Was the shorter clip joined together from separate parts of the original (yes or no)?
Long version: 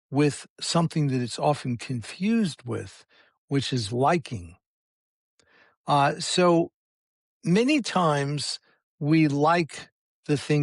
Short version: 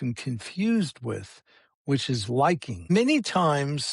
yes